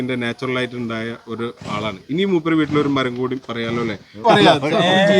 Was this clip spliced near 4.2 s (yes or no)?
yes